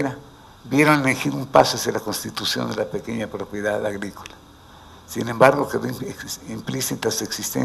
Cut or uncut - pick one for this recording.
uncut